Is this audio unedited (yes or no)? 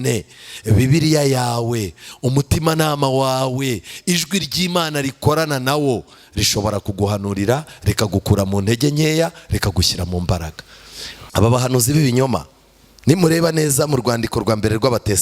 no